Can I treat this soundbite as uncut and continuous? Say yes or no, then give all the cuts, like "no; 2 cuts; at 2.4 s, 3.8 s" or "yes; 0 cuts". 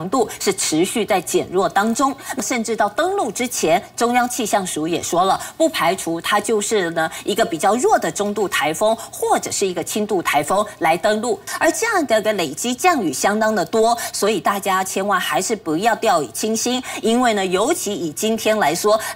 no; 2 cuts; at 2.4 s, 11.4 s